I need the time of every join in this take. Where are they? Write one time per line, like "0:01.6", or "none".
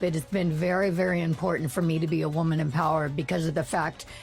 none